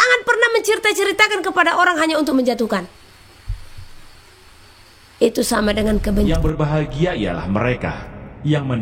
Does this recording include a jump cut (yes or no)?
yes